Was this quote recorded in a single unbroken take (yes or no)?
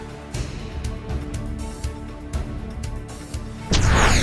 yes